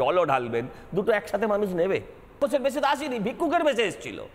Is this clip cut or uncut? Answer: cut